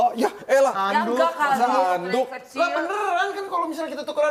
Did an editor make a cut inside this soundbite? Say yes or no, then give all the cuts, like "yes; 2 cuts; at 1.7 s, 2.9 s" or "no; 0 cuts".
no; 0 cuts